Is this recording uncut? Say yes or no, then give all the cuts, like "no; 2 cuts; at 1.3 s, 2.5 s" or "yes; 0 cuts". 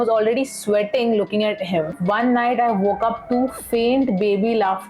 no; 1 cut; at 2.0 s